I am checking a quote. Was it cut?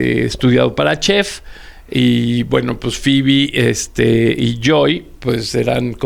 no; 0 cuts

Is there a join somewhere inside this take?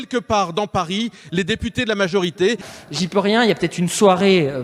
yes; 1 cut; at 2.6 s

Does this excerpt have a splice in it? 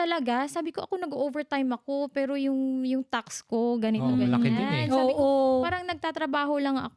no; 0 cuts

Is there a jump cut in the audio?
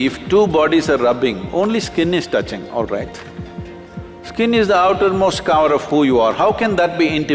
no; 0 cuts

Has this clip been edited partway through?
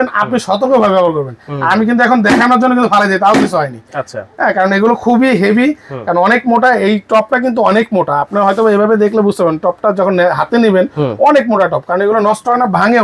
no; 0 cuts

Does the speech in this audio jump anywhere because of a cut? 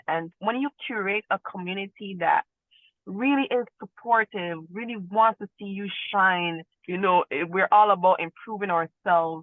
yes; 1 cut; at 6.7 s

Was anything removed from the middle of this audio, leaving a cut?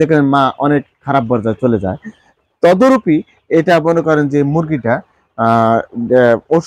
no; 0 cuts

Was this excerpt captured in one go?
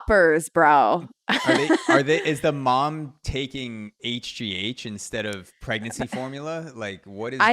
yes; 0 cuts

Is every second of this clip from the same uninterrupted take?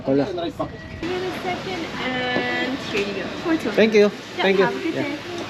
no; 1 cut; at 1.0 s

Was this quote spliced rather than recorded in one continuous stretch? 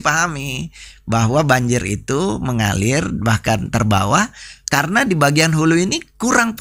no; 0 cuts

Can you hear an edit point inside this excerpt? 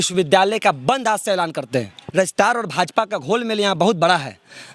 yes; 1 cut; at 2.0 s

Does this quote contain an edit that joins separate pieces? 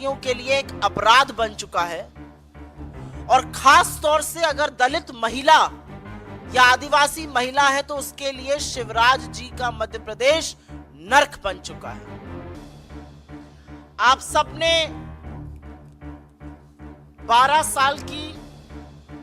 yes; 1 cut; at 18.0 s

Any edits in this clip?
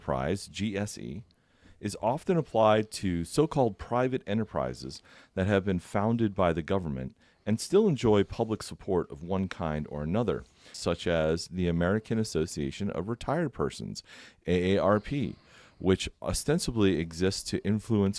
yes; 1 cut; at 10.7 s

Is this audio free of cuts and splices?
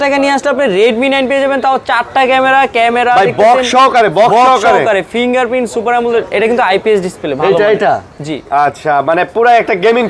yes; 0 cuts

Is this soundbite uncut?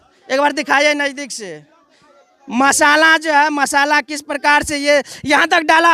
yes; 0 cuts

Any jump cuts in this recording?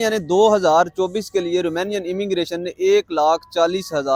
no; 0 cuts

